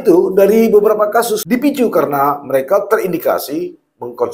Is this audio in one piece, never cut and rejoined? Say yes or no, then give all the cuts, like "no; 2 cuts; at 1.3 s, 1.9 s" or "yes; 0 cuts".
no; 1 cut; at 1.4 s